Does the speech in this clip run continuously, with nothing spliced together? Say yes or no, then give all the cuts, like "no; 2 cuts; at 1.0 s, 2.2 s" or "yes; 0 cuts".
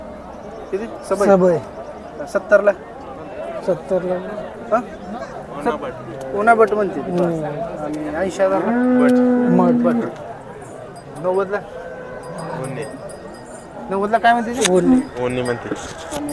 yes; 0 cuts